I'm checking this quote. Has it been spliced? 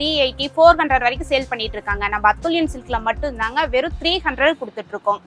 no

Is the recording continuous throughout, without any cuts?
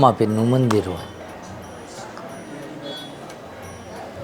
yes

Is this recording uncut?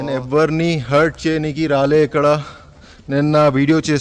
yes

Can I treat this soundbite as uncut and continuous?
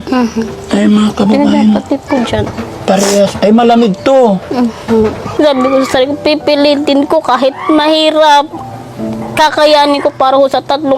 no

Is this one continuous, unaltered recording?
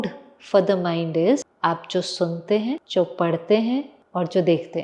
no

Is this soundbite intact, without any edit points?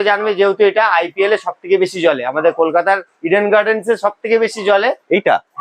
yes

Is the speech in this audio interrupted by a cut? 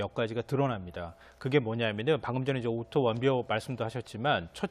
yes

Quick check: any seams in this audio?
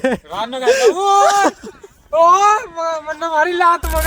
no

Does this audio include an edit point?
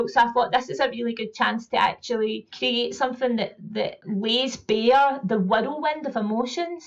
yes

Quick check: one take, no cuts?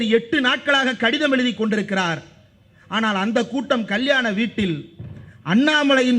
yes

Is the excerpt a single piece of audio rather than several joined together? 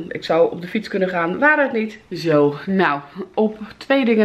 no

